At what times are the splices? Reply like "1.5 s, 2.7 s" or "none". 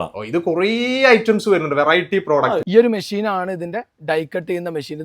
2.6 s